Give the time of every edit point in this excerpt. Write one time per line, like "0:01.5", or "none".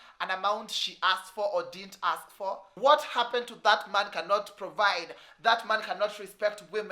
0:02.7